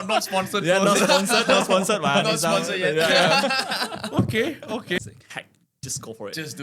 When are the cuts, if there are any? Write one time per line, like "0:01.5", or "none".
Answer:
0:05.0